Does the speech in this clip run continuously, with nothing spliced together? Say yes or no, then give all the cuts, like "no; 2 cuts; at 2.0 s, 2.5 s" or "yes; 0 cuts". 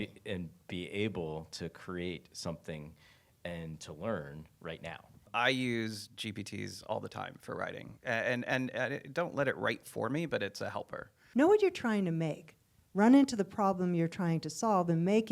no; 2 cuts; at 5.3 s, 11.2 s